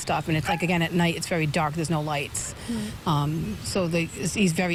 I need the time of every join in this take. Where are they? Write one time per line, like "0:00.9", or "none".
none